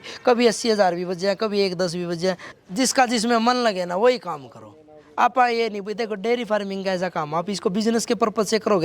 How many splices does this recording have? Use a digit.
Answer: 1